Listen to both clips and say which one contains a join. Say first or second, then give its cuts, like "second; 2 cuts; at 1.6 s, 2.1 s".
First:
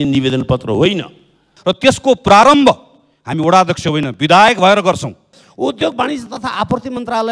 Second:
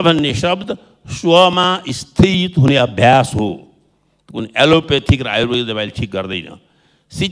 first; 2 cuts; at 1.5 s, 5.4 s